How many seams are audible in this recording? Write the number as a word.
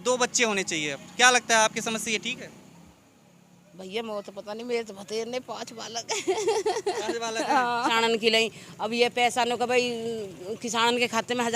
one